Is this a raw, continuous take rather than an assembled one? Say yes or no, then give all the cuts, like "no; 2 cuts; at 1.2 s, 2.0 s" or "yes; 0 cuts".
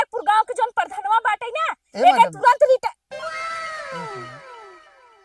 no; 1 cut; at 3.0 s